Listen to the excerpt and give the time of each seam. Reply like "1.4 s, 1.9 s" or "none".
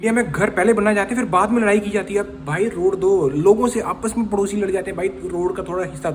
none